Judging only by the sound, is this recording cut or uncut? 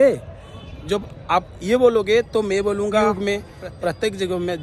cut